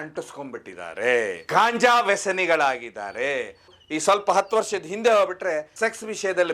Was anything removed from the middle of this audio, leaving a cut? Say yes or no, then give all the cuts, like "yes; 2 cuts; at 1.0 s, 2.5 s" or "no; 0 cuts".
yes; 1 cut; at 1.4 s